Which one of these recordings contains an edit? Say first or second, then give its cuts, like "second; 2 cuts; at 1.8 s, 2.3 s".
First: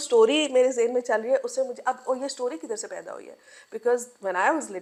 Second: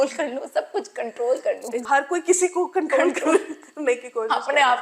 second; 1 cut; at 1.8 s